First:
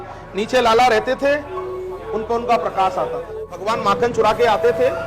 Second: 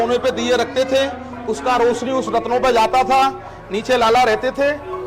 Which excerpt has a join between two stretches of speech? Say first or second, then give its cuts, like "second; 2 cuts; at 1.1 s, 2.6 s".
first; 1 cut; at 3.6 s